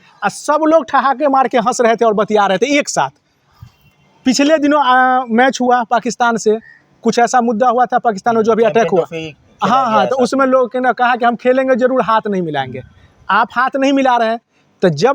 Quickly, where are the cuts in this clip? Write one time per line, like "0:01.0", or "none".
none